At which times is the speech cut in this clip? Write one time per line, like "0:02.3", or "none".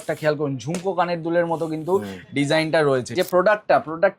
0:03.1